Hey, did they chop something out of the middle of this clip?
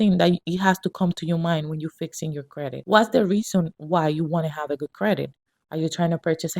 yes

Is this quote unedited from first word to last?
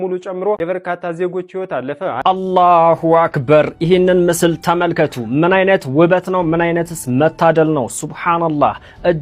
no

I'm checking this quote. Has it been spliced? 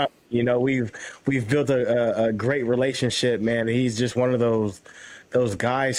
no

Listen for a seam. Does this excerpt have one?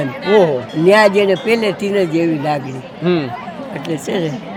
no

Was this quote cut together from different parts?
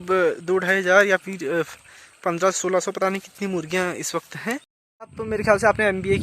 yes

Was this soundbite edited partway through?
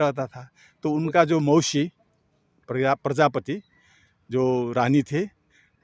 no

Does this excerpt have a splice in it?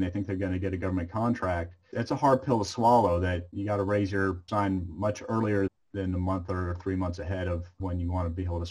yes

